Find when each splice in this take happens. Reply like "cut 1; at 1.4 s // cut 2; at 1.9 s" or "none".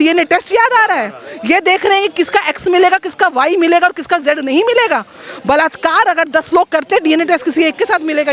none